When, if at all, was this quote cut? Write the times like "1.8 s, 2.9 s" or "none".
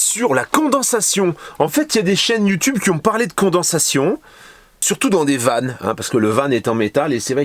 none